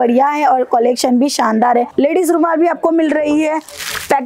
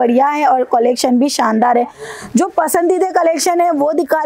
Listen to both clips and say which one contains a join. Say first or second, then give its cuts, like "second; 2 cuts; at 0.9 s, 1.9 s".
first; 1 cut; at 1.9 s